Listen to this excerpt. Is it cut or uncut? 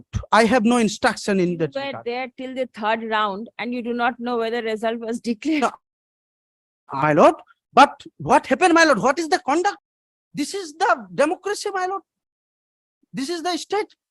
cut